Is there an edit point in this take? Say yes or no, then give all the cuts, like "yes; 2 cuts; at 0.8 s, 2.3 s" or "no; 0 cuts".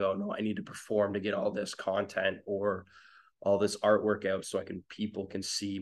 no; 0 cuts